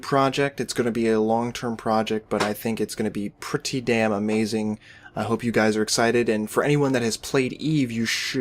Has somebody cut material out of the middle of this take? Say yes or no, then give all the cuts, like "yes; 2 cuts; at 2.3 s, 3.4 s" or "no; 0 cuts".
no; 0 cuts